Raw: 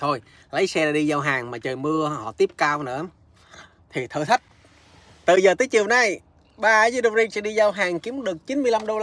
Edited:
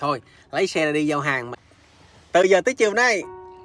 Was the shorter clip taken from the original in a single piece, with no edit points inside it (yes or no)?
no